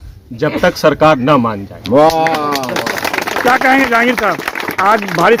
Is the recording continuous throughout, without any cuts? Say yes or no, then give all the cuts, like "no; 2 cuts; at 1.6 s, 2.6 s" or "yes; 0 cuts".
yes; 0 cuts